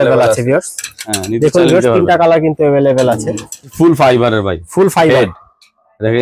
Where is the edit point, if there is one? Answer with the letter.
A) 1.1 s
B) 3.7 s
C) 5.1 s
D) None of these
B